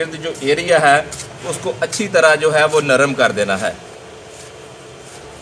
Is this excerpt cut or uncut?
uncut